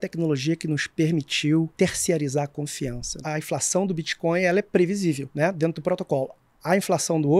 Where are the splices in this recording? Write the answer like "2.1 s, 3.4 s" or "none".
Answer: 1.7 s, 3.2 s, 5.3 s